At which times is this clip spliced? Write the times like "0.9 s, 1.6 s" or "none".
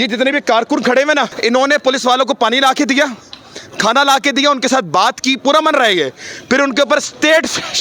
1.3 s

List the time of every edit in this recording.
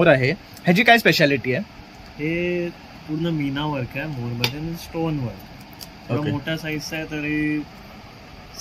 none

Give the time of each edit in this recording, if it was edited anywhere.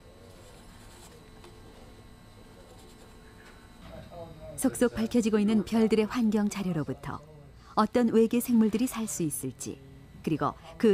8.0 s

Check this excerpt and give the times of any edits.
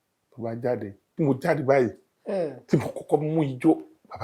1.0 s

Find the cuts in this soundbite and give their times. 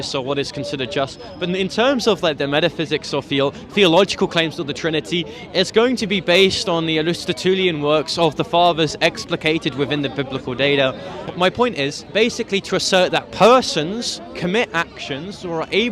11.2 s, 12.1 s

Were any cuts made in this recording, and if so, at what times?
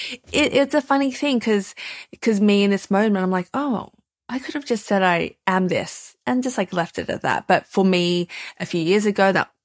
none

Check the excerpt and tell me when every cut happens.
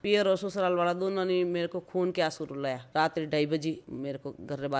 2.8 s, 3.9 s

